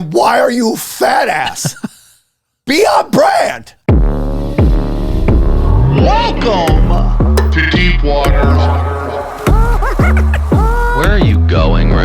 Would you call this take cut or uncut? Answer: cut